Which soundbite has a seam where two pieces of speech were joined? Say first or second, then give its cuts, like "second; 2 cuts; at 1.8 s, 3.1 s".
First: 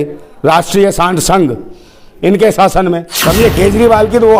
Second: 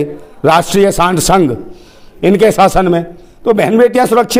first; 1 cut; at 3.1 s